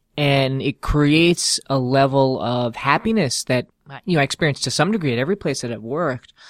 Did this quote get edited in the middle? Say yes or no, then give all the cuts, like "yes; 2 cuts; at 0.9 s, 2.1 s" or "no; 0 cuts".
yes; 1 cut; at 3.8 s